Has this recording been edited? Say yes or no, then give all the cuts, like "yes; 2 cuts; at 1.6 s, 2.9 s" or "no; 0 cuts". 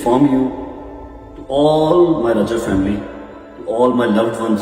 no; 0 cuts